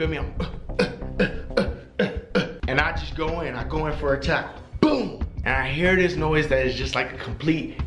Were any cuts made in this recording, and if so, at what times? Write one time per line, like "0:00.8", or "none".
0:02.6
0:05.3